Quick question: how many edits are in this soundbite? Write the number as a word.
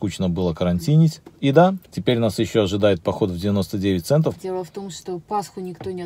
three